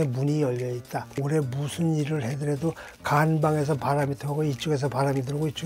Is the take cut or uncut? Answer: cut